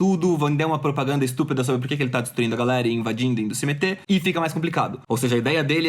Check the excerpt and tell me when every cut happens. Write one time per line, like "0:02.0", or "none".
0:04.0
0:05.0